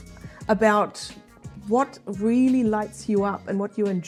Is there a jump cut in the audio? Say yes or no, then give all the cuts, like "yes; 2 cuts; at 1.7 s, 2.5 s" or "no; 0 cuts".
no; 0 cuts